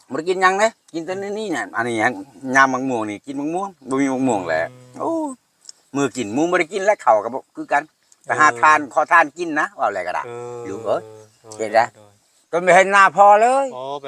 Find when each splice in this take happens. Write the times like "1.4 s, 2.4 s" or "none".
12.4 s